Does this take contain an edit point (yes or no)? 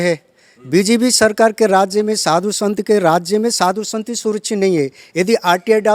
no